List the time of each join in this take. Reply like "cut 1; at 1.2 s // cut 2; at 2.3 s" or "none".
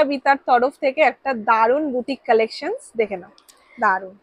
none